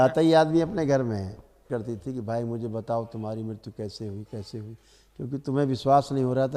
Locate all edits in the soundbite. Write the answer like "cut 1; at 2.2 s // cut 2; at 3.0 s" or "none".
cut 1; at 1.7 s